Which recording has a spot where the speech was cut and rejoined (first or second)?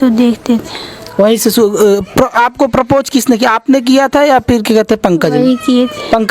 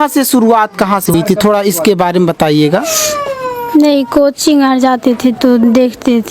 second